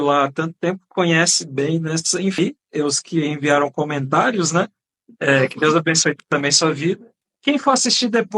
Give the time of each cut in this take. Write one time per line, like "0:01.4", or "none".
0:02.4